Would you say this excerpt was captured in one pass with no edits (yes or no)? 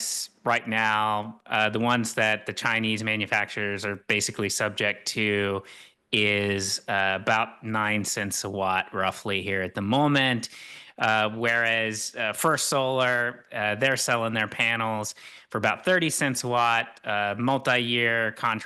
yes